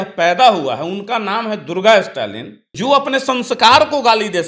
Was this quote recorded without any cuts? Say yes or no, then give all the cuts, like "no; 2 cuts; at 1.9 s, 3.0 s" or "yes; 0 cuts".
no; 1 cut; at 2.6 s